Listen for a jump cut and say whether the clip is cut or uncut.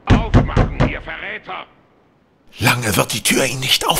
uncut